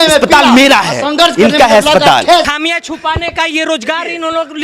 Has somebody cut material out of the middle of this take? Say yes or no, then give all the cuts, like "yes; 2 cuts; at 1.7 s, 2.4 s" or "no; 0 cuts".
yes; 1 cut; at 2.6 s